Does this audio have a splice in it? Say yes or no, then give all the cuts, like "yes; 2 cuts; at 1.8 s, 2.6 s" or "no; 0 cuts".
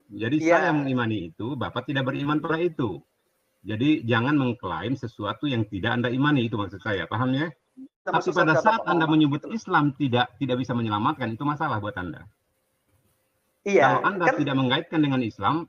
yes; 1 cut; at 8.0 s